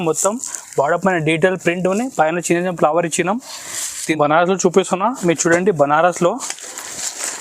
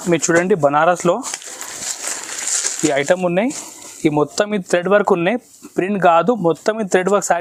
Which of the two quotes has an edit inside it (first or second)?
first